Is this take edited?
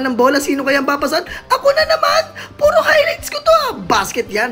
no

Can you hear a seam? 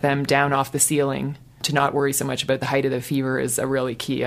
no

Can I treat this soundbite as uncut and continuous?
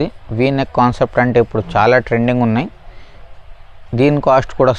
yes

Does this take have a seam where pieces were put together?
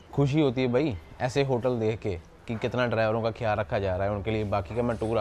no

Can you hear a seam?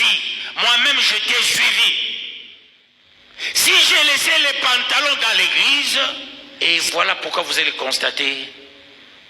yes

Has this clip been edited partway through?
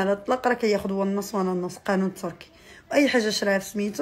no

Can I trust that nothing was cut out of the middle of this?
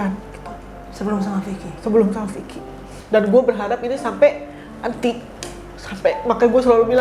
no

